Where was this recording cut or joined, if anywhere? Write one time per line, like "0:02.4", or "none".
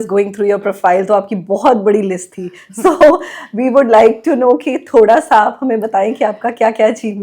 none